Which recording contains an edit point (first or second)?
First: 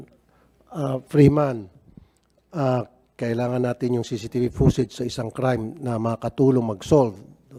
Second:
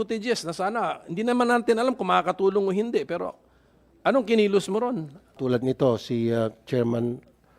second